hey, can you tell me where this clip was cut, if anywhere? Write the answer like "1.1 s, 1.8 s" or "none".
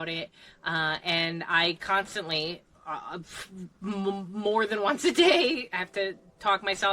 5.7 s